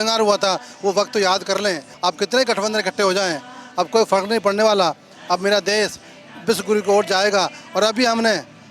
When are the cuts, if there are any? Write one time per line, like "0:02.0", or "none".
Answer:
0:01.9